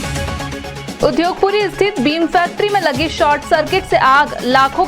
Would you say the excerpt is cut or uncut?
cut